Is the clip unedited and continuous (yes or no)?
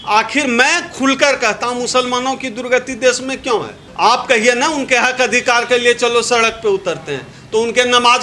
yes